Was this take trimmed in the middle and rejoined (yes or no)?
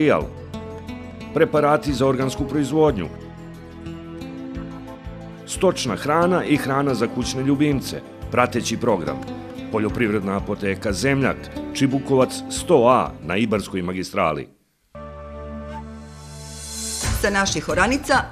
yes